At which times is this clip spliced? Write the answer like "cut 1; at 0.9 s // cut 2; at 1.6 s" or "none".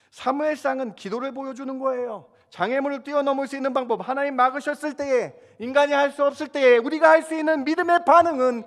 none